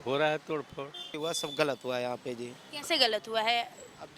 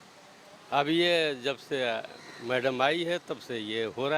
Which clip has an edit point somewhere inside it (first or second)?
first